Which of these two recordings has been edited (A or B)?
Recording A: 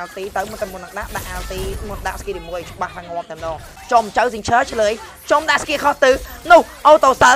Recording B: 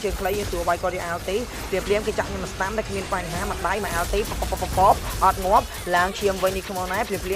A